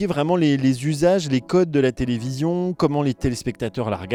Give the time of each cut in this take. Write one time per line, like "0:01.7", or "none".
none